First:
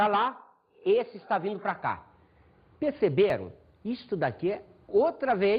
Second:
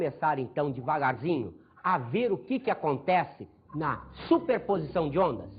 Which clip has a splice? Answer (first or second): first